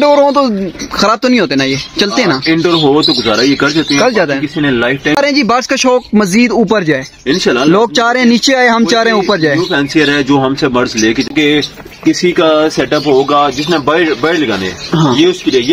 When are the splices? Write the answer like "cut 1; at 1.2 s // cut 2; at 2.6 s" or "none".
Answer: cut 1; at 5.2 s // cut 2; at 11.3 s